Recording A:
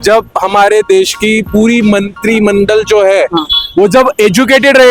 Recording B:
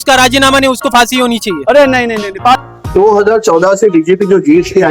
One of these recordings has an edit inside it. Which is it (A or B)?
B